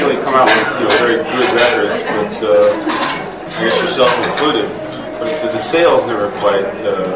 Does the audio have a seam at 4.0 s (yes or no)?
yes